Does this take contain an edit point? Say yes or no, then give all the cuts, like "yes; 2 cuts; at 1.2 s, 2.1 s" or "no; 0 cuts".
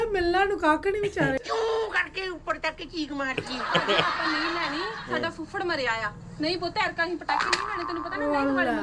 yes; 1 cut; at 1.4 s